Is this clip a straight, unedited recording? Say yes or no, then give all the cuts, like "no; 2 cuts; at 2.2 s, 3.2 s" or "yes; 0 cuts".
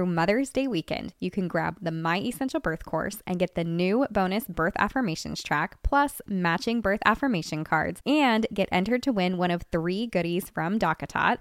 yes; 0 cuts